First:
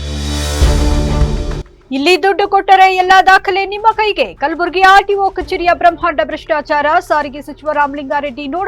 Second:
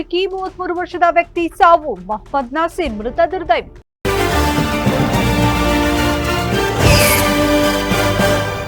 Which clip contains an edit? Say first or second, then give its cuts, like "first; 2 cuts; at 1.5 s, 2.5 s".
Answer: first; 1 cut; at 1.6 s